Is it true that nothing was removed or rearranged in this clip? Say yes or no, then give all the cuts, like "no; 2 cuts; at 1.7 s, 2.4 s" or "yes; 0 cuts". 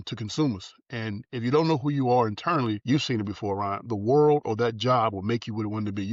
yes; 0 cuts